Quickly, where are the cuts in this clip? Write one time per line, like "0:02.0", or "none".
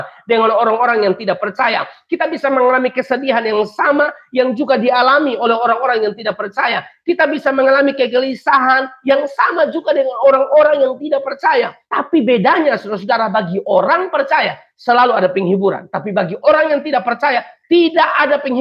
none